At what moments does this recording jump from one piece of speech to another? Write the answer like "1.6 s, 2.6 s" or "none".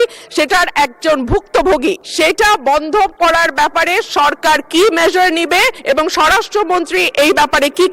2.1 s, 5.8 s